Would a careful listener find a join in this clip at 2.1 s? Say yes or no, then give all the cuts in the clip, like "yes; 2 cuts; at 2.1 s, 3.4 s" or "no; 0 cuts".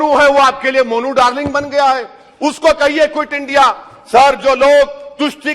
no; 0 cuts